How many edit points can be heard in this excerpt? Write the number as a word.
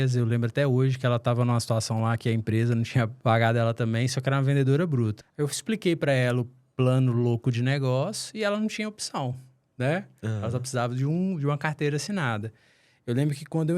two